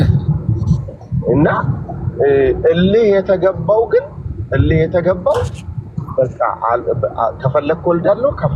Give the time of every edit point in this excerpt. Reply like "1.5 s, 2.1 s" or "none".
none